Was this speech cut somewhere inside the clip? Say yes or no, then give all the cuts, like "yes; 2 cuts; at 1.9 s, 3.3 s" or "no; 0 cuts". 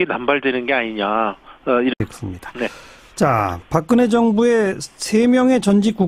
no; 0 cuts